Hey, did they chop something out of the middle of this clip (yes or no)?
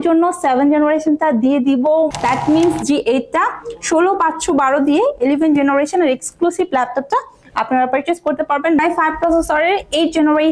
yes